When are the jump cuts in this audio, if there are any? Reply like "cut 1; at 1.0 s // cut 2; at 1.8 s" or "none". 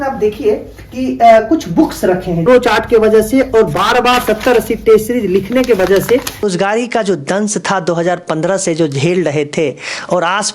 cut 1; at 2.4 s // cut 2; at 6.4 s